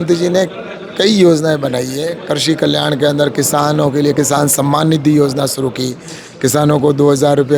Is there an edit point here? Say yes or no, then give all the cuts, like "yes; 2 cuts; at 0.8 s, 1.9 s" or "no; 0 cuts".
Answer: no; 0 cuts